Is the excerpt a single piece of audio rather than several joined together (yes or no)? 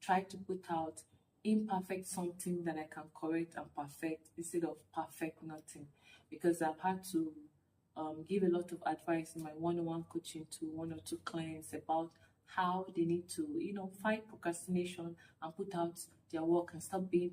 yes